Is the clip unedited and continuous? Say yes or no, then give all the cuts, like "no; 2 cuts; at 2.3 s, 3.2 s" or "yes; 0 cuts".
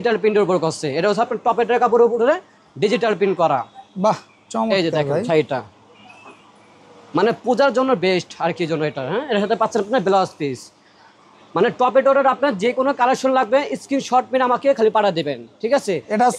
yes; 0 cuts